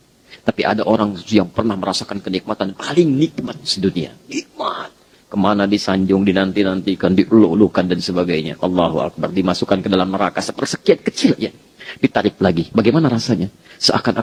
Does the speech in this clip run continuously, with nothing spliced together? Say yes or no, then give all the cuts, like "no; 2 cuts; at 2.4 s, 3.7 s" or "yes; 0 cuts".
yes; 0 cuts